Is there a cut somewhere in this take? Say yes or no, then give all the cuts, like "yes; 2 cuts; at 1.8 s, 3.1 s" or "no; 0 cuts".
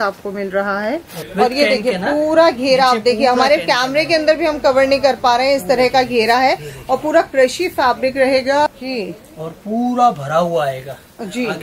yes; 2 cuts; at 1.2 s, 8.7 s